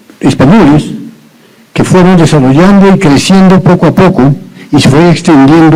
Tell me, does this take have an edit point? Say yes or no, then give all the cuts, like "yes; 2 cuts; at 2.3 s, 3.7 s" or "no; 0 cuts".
no; 0 cuts